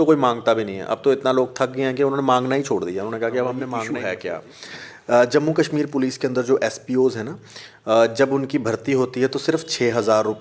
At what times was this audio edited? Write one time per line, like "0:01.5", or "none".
0:03.9